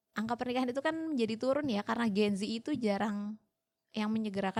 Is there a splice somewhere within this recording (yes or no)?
no